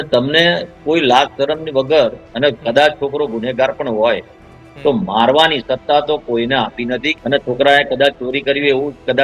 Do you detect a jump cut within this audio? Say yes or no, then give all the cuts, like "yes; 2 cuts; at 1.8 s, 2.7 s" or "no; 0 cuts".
yes; 2 cuts; at 2.2 s, 7.1 s